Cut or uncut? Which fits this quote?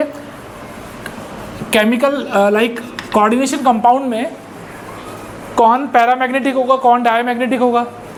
uncut